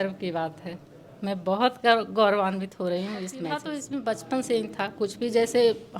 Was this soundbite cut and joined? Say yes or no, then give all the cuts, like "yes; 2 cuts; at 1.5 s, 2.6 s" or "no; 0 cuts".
yes; 1 cut; at 3.7 s